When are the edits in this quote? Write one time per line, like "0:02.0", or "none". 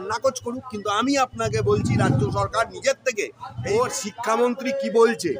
0:03.5